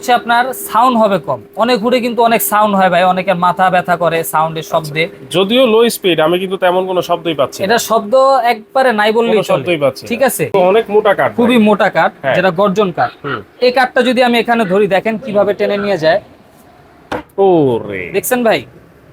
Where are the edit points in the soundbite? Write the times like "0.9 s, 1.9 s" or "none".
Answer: 10.4 s